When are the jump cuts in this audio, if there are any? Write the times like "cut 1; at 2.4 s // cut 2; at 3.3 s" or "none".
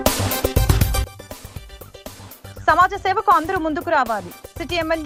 none